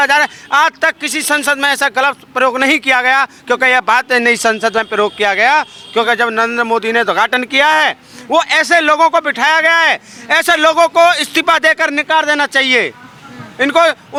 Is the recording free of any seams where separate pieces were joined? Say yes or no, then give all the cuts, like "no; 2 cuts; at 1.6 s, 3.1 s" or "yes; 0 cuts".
yes; 0 cuts